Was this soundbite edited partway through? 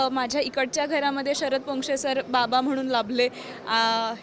no; 0 cuts

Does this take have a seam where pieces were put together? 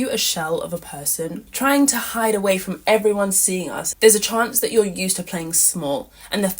yes; 2 cuts; at 1.5 s, 3.8 s

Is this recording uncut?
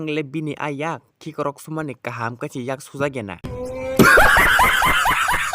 no; 1 cut; at 3.4 s

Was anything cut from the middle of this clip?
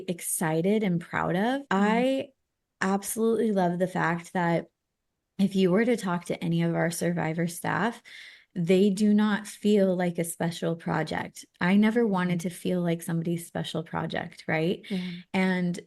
yes; 1 cut; at 1.6 s

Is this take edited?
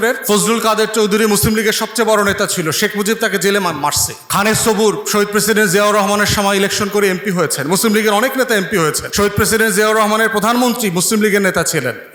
no; 0 cuts

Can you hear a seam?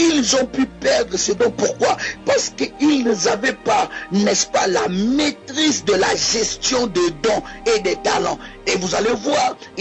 yes; 1 cut; at 2.1 s

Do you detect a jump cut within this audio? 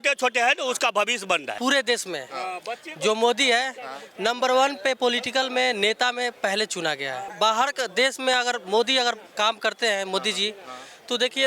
yes; 2 cuts; at 1.6 s, 7.3 s

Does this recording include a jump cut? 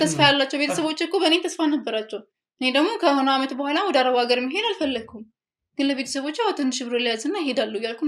no; 0 cuts

